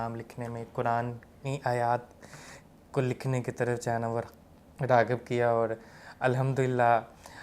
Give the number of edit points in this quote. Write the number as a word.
zero